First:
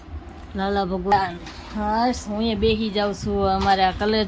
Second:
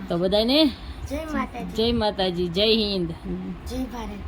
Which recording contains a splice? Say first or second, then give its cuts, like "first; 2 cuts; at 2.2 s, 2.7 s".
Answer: first; 1 cut; at 1.1 s